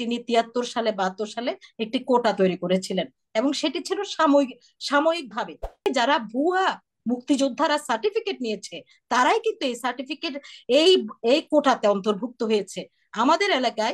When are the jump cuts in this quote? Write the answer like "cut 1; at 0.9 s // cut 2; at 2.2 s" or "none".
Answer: cut 1; at 5.9 s

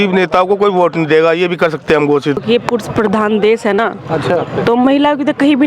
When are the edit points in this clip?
cut 1; at 2.4 s

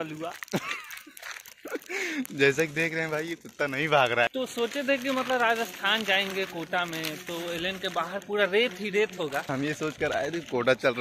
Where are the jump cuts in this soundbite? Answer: cut 1; at 4.3 s // cut 2; at 9.5 s

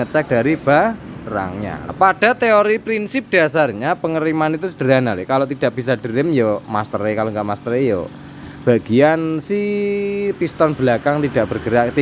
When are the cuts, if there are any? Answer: cut 1; at 1.9 s

